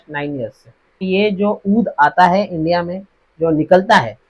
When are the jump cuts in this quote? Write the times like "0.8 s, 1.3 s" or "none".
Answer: 1.0 s